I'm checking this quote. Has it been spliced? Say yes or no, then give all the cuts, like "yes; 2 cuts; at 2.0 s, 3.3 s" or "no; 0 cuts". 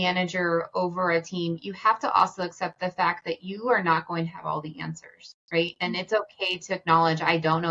no; 0 cuts